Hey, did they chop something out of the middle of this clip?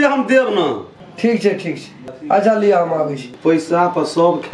yes; 1 cut; at 3.2 s

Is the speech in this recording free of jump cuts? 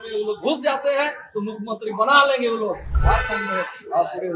no; 1 cut; at 2.9 s

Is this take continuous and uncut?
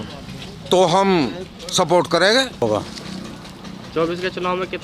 no; 1 cut; at 2.6 s

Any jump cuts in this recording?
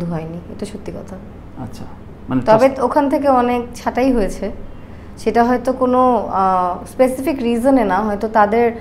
no; 0 cuts

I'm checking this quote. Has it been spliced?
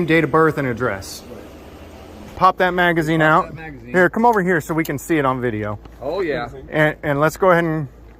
yes; 1 cut; at 2.3 s

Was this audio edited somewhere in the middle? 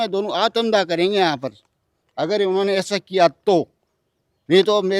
no; 0 cuts

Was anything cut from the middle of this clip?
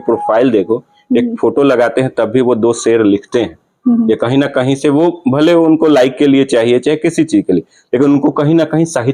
no; 0 cuts

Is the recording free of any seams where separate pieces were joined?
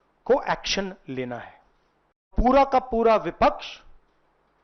no; 1 cut; at 2.3 s

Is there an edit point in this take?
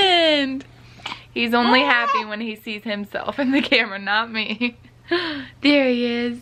no; 0 cuts

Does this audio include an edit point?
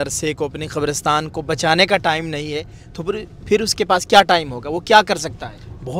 no; 0 cuts

